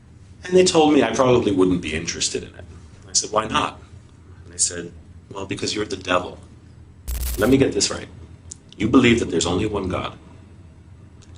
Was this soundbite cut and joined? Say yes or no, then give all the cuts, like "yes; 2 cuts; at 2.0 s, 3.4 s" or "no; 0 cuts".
yes; 1 cut; at 7.2 s